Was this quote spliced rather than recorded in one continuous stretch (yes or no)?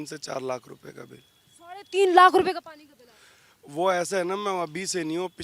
no